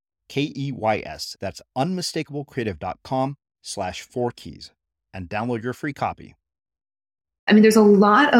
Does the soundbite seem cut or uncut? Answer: cut